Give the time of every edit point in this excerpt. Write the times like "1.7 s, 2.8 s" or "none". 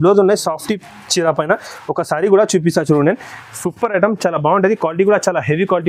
none